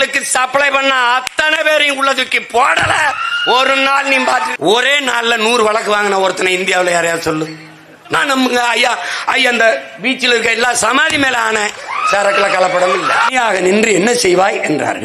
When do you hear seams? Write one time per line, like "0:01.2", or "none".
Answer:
0:04.5
0:08.2
0:13.3